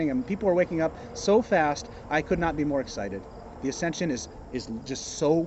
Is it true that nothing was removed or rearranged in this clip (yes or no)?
yes